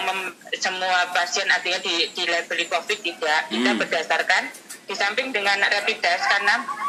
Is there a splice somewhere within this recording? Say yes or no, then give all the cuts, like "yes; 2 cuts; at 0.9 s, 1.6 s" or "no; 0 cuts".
no; 0 cuts